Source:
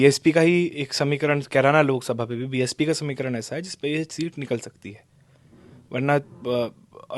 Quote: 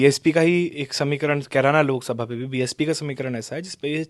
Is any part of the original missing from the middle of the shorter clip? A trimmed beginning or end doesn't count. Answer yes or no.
no